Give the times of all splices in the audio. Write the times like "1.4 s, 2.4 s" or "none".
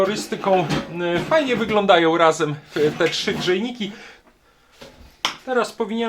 4.1 s